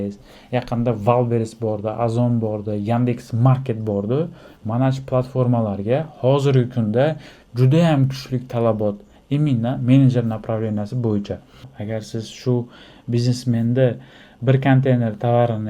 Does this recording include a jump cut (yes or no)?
yes